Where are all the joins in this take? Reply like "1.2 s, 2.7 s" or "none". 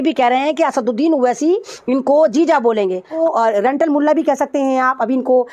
3.1 s